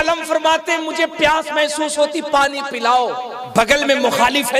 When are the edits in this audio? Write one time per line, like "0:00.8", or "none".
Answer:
0:03.3

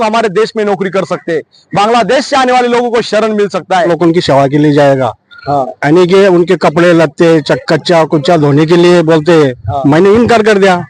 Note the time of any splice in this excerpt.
0:03.9

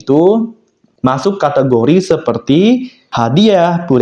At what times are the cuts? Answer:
0:03.0

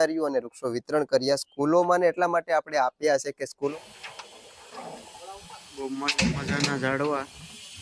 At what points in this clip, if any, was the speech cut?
0:03.7

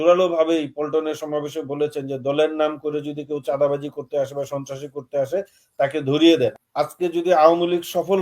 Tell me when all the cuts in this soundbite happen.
0:06.6

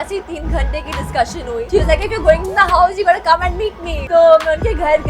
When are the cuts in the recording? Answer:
0:01.7
0:03.9

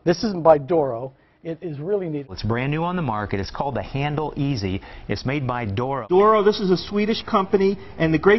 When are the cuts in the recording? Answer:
0:02.3
0:06.0

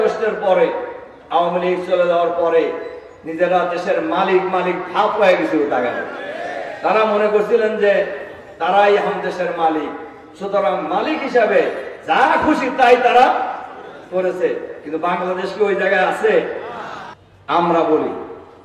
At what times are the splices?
none

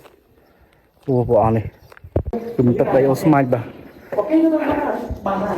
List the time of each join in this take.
0:02.3

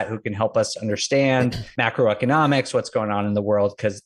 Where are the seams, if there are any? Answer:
0:01.7

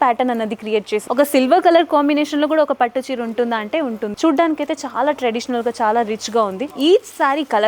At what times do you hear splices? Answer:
0:01.0
0:04.1
0:06.6

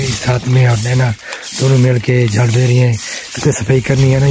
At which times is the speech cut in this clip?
none

